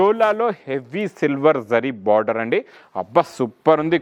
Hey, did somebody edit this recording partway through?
no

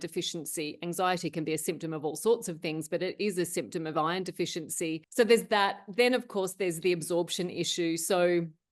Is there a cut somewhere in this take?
yes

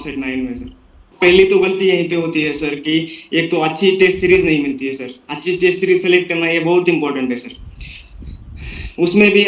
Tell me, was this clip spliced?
yes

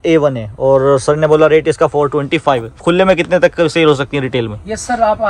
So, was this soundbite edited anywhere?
no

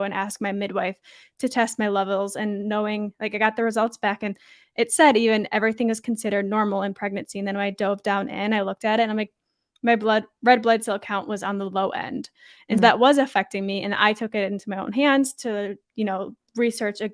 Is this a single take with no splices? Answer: yes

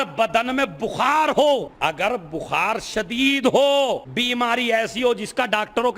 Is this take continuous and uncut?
no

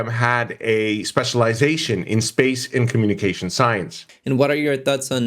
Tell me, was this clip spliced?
yes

